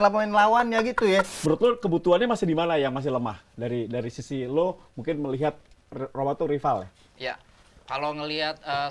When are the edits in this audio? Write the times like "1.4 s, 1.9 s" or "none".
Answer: 1.3 s